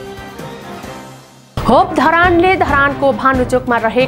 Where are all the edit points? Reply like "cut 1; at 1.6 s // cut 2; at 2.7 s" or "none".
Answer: cut 1; at 1.3 s